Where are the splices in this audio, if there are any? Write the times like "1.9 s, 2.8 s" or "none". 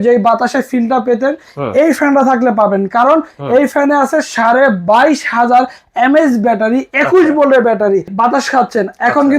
8.1 s